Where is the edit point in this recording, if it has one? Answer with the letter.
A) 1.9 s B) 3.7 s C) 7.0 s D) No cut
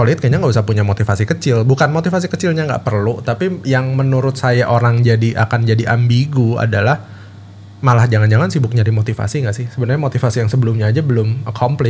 D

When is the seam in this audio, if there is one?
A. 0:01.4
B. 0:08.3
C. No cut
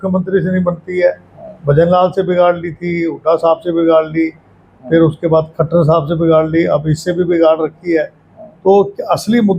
C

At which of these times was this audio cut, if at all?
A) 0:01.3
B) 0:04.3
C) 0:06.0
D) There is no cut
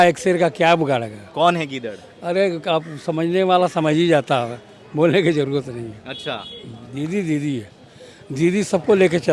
D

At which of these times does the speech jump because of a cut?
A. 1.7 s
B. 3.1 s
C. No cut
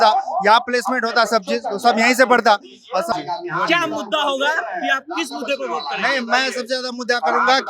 B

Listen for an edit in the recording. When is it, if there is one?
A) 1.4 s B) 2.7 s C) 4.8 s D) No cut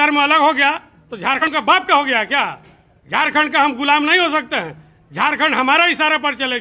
A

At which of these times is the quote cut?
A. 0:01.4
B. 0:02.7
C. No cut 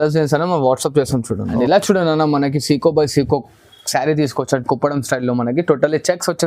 A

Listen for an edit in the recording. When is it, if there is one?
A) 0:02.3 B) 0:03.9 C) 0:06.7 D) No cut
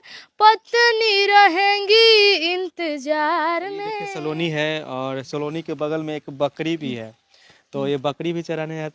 B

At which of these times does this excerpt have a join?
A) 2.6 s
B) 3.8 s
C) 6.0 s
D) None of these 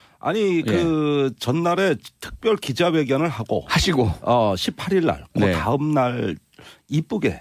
D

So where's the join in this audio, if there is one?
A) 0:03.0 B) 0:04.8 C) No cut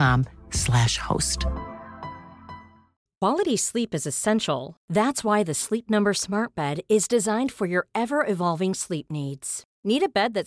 A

